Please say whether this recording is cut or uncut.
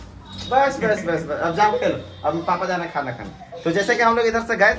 uncut